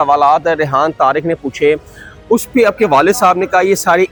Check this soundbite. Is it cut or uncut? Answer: uncut